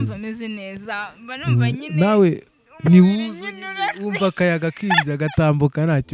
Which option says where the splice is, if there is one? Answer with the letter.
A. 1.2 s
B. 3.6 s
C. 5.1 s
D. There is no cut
D